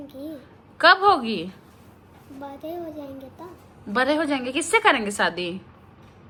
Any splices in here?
no; 0 cuts

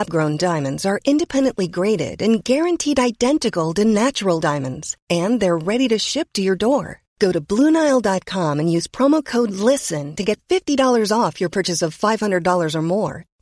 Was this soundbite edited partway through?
no; 0 cuts

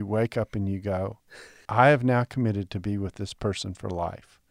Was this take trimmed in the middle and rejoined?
no; 0 cuts

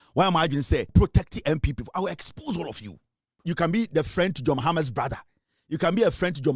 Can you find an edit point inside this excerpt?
yes; 2 cuts; at 0.9 s, 3.4 s

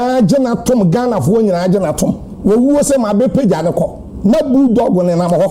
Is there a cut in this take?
yes; 2 cuts; at 2.3 s, 4.0 s

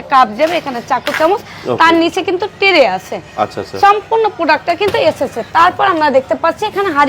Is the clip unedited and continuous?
yes; 0 cuts

